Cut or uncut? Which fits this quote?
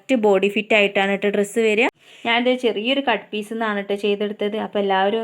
cut